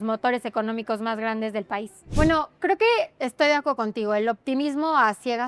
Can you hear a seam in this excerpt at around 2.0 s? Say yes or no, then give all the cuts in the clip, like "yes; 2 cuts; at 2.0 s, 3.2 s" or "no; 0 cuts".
yes; 1 cut; at 2.0 s